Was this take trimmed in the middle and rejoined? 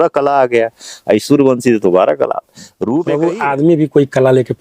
yes; 1 cut; at 3.1 s

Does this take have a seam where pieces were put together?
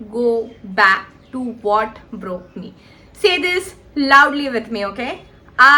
no; 0 cuts

